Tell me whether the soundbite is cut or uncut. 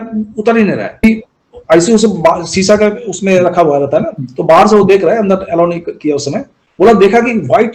cut